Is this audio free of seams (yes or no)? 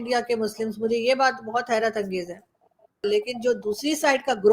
no